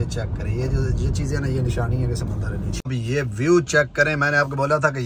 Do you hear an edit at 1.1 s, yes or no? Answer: no